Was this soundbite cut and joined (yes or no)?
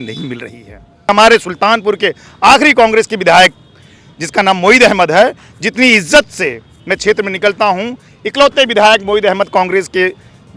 yes